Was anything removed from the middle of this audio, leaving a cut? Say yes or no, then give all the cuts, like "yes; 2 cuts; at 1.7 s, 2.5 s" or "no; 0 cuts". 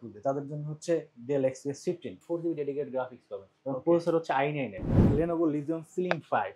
yes; 2 cuts; at 2.1 s, 5.0 s